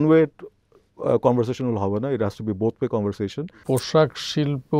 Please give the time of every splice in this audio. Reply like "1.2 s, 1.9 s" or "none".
3.6 s